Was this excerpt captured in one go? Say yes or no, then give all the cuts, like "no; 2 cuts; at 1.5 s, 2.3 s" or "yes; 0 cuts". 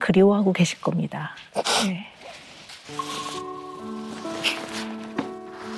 yes; 0 cuts